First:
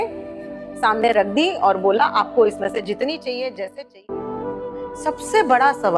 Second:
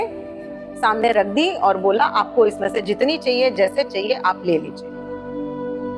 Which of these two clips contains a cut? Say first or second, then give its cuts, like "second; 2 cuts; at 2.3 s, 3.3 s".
first; 1 cut; at 3.9 s